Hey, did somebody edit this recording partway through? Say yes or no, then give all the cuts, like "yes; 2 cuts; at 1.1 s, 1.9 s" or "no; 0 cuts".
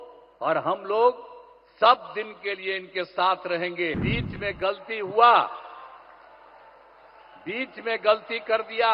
yes; 1 cut; at 4.0 s